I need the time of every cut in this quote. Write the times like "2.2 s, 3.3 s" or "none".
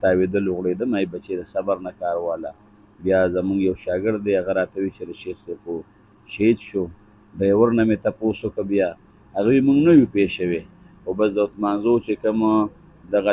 none